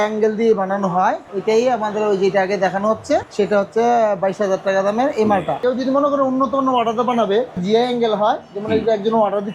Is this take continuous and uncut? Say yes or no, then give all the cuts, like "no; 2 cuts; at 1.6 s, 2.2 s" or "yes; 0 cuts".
no; 4 cuts; at 1.2 s, 3.3 s, 5.6 s, 7.6 s